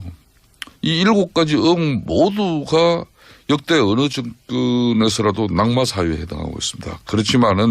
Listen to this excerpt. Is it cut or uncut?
cut